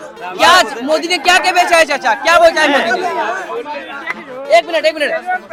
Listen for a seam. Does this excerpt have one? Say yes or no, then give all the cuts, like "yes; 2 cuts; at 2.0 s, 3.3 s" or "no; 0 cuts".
no; 0 cuts